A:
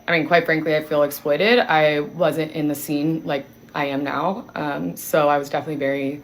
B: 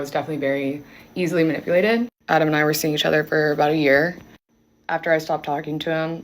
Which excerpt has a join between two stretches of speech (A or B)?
B